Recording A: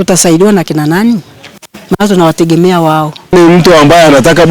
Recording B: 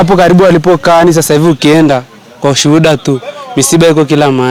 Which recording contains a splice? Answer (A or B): A